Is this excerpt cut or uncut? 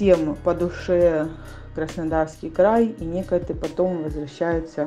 uncut